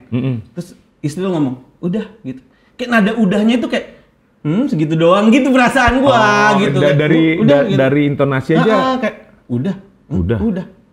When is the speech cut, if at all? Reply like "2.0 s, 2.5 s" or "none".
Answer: none